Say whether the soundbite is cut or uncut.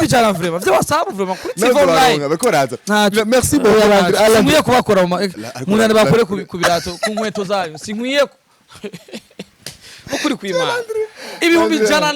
uncut